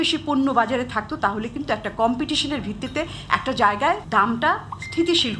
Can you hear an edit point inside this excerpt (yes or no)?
yes